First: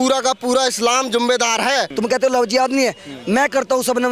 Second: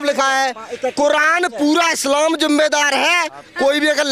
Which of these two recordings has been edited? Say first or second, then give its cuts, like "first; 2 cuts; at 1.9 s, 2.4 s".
first; 1 cut; at 1.9 s